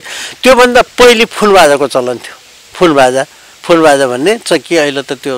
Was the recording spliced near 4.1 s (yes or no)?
no